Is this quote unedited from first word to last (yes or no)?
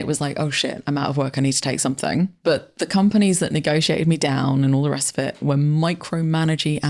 no